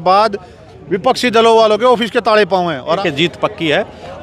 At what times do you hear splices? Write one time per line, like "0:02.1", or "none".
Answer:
0:03.0